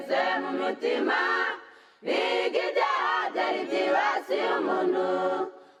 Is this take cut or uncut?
uncut